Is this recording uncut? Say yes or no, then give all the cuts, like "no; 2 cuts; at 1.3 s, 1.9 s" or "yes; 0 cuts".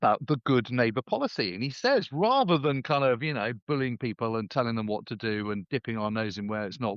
yes; 0 cuts